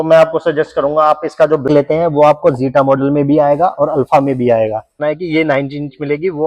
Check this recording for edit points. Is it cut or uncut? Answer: cut